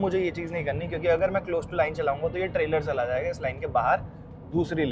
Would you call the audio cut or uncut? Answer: uncut